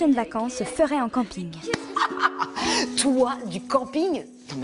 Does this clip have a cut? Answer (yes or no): yes